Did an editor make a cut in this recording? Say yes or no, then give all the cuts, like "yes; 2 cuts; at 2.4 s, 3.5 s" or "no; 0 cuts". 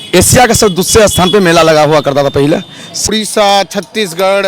yes; 1 cut; at 2.9 s